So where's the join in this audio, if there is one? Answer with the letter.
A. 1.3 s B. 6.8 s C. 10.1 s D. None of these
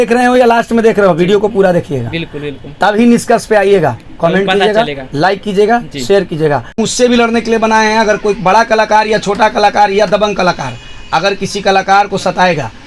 B